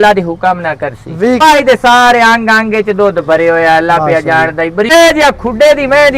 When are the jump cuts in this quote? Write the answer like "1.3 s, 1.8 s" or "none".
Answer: 1.4 s, 4.9 s